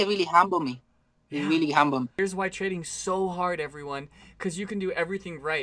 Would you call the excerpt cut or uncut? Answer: cut